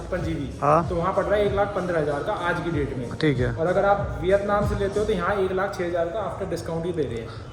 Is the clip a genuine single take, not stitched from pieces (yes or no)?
yes